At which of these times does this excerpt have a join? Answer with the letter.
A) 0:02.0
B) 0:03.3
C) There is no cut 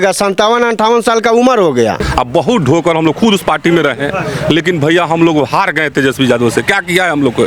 A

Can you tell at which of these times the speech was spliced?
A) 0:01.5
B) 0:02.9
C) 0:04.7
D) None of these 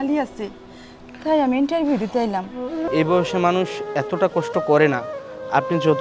B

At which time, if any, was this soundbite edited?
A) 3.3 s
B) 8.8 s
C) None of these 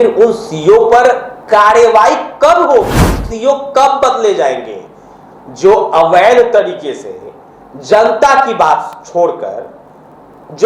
A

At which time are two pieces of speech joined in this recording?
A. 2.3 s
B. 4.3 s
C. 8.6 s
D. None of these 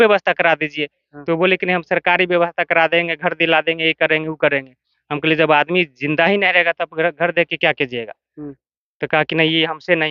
D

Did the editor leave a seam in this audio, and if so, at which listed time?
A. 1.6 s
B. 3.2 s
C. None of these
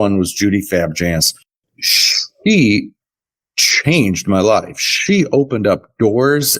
A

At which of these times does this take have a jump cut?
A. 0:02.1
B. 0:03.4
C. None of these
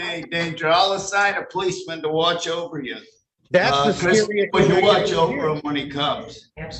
C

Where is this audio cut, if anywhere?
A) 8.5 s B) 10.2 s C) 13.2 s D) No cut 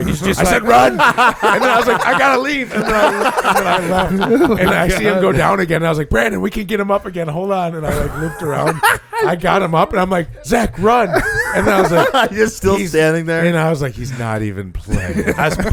D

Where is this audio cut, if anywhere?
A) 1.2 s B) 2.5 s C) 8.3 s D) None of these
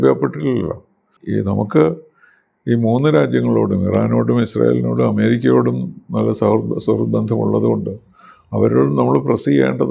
A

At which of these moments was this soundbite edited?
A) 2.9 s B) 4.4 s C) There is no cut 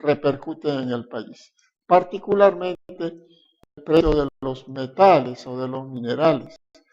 B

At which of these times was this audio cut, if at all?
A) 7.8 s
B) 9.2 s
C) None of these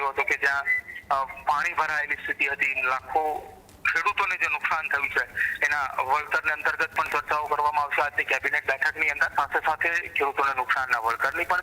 B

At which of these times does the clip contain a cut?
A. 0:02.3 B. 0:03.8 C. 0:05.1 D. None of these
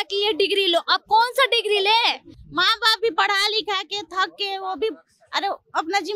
A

